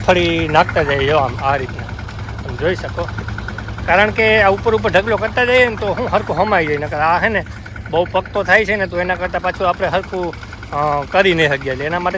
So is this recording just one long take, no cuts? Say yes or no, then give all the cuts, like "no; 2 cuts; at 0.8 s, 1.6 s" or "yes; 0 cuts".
yes; 0 cuts